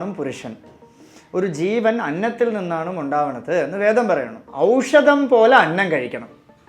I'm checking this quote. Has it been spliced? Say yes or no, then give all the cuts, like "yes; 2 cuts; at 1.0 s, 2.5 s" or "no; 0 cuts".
yes; 1 cut; at 4.4 s